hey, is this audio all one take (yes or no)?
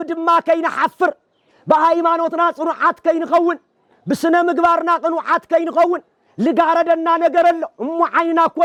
yes